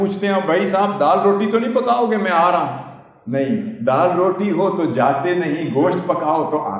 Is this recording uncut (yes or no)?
yes